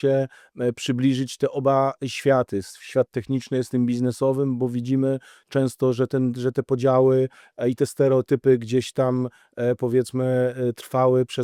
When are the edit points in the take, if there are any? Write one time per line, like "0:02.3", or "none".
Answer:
none